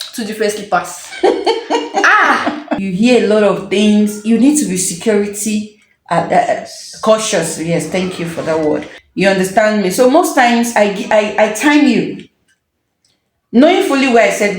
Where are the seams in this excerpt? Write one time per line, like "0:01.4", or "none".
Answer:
0:02.7
0:09.0